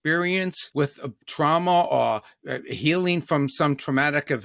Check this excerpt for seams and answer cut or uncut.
cut